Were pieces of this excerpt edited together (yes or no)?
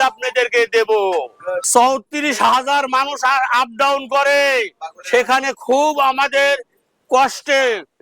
yes